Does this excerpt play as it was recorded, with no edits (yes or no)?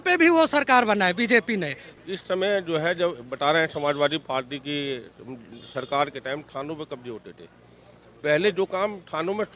no